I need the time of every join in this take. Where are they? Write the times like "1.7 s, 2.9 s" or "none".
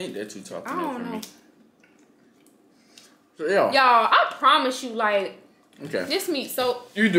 2.7 s